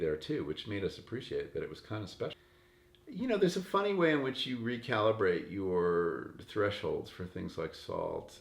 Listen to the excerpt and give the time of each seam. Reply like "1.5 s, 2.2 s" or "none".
2.3 s